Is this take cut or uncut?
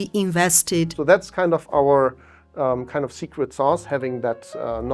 cut